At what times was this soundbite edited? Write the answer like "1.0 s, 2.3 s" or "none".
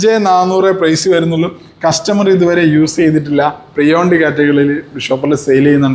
none